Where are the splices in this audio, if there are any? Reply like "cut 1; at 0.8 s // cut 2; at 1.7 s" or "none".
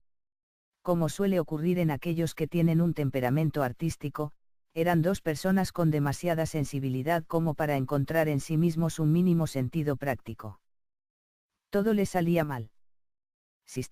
none